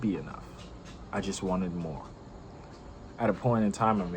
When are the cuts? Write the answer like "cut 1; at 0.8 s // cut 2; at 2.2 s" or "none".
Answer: none

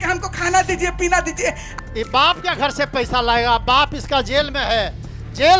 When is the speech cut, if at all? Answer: cut 1; at 1.7 s

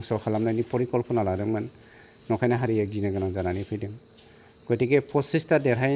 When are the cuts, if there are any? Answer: none

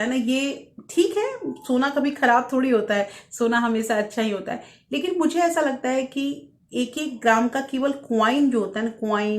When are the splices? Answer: none

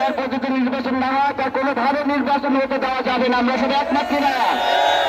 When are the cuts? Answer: none

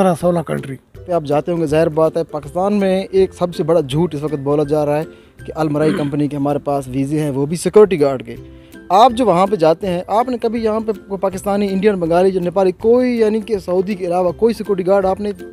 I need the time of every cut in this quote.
cut 1; at 1.1 s

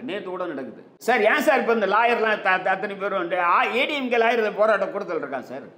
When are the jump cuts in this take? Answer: cut 1; at 0.9 s

